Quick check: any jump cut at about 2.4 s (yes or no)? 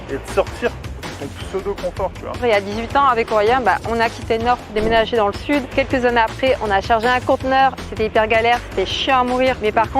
yes